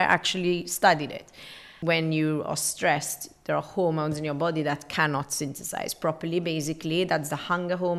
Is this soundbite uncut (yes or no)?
no